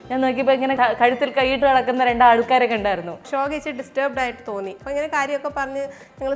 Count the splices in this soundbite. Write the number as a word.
three